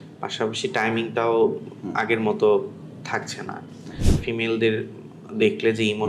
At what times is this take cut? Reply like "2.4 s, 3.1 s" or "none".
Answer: 4.2 s